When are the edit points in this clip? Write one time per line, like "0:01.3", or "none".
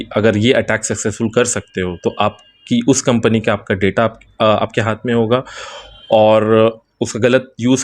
none